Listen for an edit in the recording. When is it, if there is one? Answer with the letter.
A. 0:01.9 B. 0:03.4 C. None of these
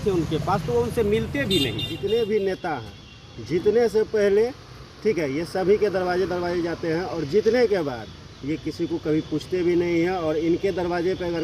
A